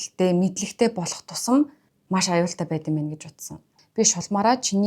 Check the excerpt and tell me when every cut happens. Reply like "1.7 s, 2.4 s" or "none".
3.8 s